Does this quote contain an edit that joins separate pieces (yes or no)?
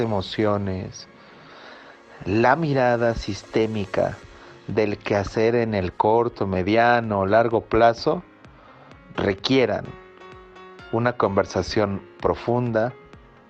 no